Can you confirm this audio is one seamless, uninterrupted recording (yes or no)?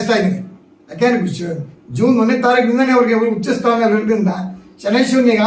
yes